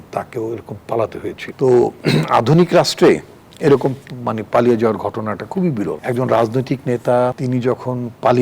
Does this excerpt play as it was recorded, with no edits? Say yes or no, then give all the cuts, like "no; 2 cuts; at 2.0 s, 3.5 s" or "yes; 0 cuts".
no; 3 cuts; at 1.4 s, 6.0 s, 7.4 s